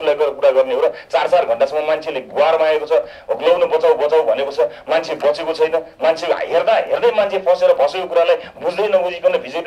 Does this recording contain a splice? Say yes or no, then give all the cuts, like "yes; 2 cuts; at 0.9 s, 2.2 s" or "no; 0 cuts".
no; 0 cuts